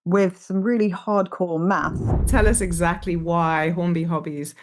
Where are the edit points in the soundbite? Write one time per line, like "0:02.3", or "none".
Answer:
0:02.2